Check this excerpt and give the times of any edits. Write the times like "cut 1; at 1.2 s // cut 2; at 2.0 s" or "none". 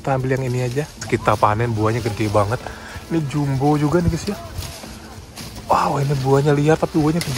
cut 1; at 1.0 s